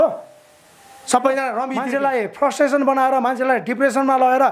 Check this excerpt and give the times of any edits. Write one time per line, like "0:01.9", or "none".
0:01.8